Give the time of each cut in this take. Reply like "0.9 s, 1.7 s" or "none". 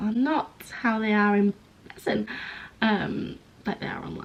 none